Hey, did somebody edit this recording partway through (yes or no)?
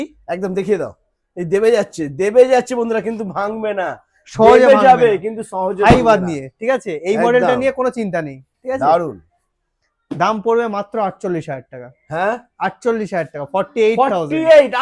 no